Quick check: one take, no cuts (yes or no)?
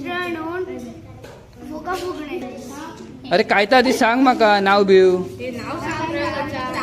no